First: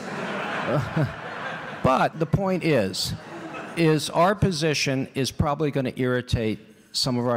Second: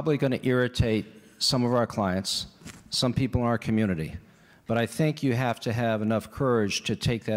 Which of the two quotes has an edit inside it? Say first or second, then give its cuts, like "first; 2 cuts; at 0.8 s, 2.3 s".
first; 1 cut; at 2.1 s